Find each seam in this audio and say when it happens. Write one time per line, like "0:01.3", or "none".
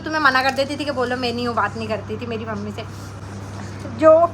0:03.2